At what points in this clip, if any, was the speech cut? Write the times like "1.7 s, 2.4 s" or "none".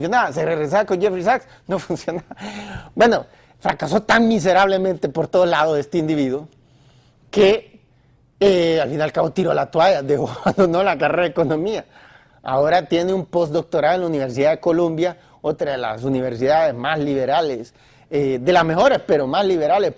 none